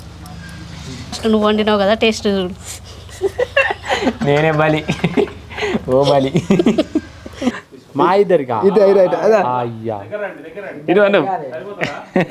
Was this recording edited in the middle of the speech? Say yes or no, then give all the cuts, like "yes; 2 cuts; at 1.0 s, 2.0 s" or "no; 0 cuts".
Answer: yes; 2 cuts; at 1.2 s, 7.7 s